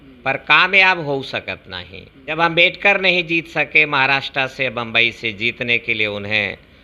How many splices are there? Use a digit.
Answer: 1